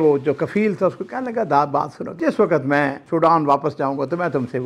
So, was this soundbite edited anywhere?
yes; 2 cuts; at 2.2 s, 3.0 s

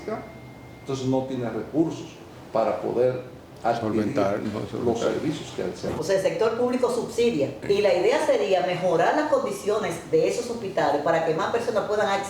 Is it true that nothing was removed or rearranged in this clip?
no; 2 cuts; at 5.9 s, 7.6 s

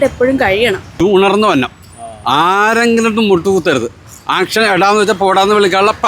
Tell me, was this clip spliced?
yes; 1 cut; at 1.0 s

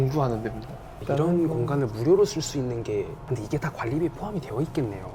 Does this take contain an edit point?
no; 0 cuts

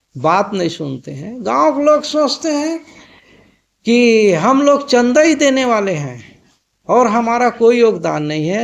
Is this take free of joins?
yes; 0 cuts

